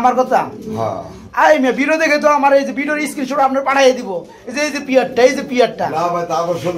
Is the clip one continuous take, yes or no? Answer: yes